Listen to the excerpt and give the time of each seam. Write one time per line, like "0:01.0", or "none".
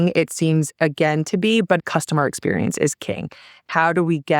0:01.8
0:03.6